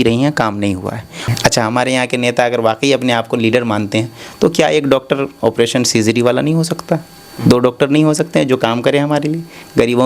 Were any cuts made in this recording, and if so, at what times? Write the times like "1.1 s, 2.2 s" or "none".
1.2 s